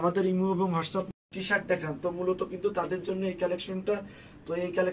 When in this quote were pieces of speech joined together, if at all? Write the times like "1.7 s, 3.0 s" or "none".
1.1 s

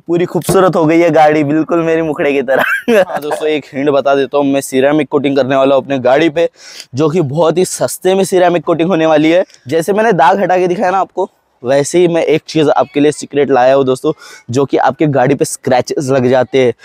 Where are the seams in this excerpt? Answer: 3.3 s, 9.6 s

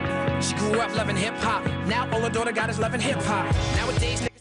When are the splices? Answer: 1.8 s

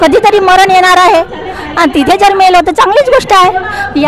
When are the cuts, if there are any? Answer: none

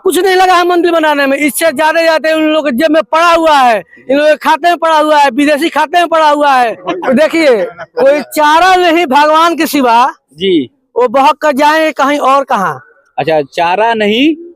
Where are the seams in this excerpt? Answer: 6.9 s

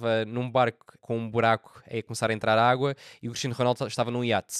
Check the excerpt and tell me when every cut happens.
0.9 s

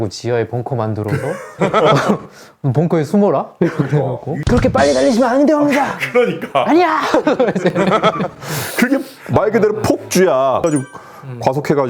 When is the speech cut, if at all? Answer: 4.4 s, 10.6 s

